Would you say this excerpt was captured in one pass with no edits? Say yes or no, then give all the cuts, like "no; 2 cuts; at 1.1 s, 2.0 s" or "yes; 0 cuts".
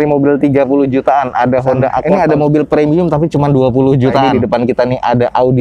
no; 2 cuts; at 2.0 s, 4.3 s